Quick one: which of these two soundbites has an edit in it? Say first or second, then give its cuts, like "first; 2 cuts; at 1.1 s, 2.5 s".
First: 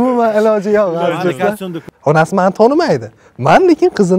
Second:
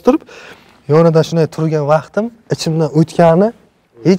first; 1 cut; at 1.8 s